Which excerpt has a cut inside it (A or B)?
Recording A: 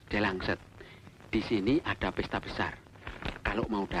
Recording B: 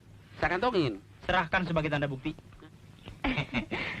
B